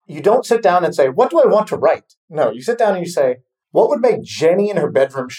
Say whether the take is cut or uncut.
cut